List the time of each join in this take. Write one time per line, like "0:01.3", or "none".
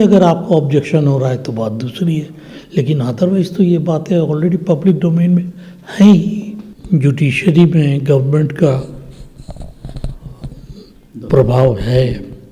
0:06.7